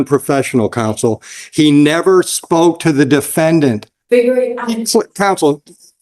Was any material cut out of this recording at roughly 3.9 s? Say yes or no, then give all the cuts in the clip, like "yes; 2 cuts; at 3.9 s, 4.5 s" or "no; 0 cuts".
yes; 1 cut; at 3.9 s